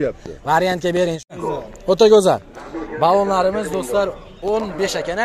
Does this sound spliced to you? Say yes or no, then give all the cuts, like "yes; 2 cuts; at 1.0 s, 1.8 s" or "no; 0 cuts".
yes; 1 cut; at 1.5 s